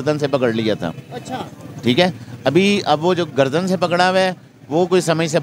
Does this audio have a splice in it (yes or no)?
no